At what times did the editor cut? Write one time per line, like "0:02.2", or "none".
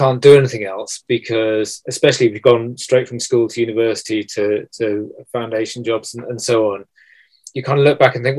none